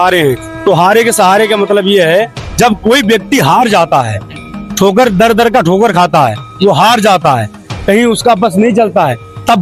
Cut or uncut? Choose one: uncut